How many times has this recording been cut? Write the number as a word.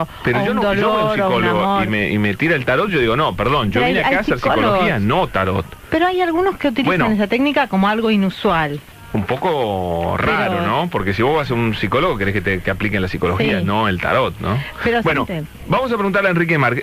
one